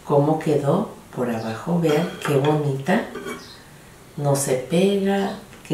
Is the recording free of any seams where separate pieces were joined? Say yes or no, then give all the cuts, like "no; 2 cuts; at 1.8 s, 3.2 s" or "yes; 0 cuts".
yes; 0 cuts